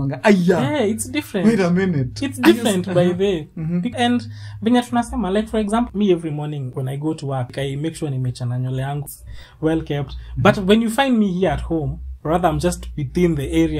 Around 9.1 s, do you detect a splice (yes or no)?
yes